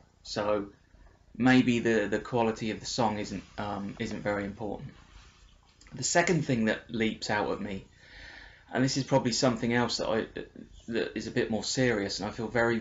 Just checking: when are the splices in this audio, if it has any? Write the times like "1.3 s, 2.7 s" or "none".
none